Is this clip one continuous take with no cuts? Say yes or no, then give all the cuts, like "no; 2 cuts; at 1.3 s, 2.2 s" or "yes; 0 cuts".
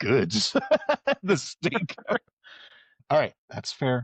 no; 1 cut; at 3.0 s